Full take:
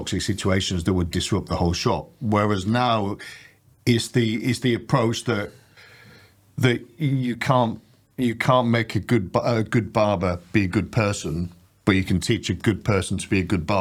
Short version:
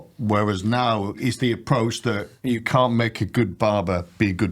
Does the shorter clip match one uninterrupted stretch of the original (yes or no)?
no